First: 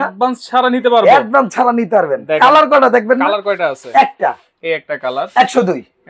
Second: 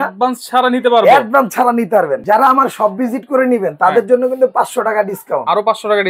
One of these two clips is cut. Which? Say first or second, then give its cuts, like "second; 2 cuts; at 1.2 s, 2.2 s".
second; 1 cut; at 2.2 s